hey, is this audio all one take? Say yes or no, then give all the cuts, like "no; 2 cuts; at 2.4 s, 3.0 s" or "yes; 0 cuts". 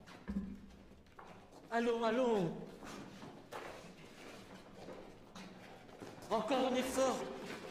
yes; 0 cuts